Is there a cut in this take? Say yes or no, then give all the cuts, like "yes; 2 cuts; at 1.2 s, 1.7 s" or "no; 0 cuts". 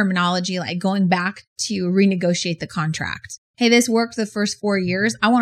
yes; 1 cut; at 3.4 s